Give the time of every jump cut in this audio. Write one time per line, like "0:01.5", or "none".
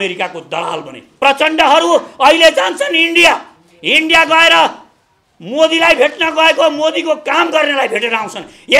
0:01.0